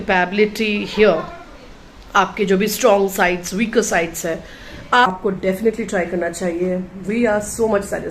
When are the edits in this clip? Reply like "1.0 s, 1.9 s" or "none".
5.1 s